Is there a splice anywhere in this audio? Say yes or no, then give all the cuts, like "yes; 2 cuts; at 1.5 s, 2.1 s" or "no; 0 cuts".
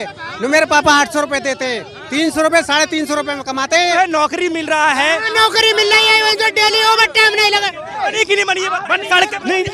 yes; 2 cuts; at 3.9 s, 7.9 s